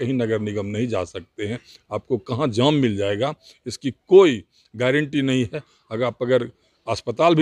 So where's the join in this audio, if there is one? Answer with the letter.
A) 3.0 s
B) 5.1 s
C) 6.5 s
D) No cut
D